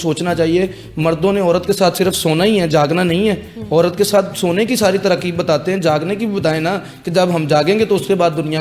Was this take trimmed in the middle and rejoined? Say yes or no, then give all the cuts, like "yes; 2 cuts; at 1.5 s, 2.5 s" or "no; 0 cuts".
no; 0 cuts